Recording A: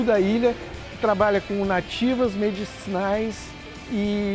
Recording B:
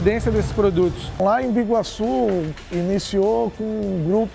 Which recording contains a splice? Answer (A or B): B